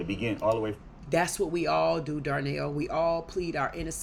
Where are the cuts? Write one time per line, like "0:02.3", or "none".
none